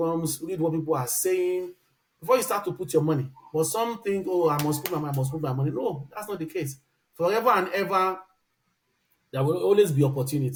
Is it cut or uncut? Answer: uncut